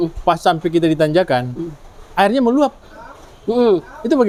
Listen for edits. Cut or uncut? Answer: uncut